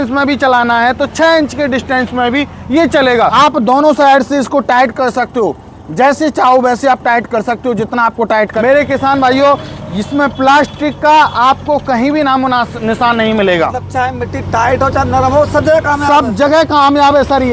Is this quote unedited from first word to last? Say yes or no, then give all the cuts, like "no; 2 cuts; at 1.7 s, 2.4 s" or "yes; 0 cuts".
no; 3 cuts; at 3.3 s, 8.5 s, 13.8 s